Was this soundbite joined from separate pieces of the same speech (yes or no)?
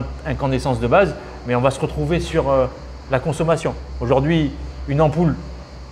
no